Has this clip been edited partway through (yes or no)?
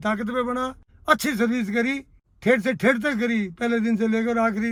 no